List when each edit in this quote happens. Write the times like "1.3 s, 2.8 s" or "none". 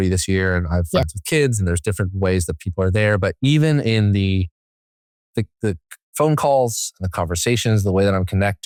none